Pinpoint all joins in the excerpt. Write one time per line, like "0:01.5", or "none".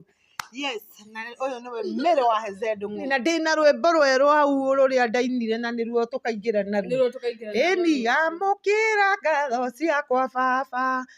0:03.0

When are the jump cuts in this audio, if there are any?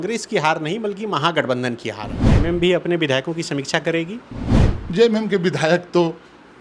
0:02.2

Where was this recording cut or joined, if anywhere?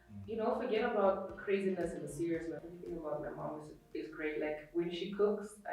0:02.6

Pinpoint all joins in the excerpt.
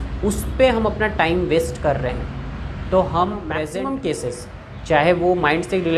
0:03.5

